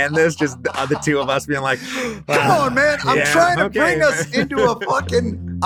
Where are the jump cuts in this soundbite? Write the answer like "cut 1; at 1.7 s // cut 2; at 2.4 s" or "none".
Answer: none